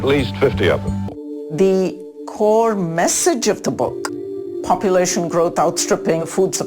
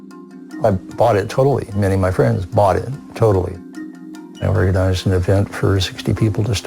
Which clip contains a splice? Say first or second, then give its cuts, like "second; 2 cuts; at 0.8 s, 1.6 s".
first; 1 cut; at 1.1 s